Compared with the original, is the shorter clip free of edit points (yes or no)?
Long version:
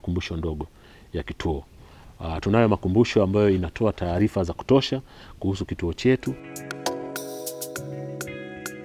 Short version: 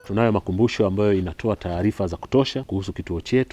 no